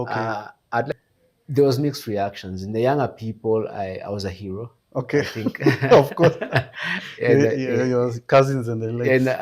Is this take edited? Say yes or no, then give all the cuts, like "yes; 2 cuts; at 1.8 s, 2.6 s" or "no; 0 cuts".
yes; 1 cut; at 0.9 s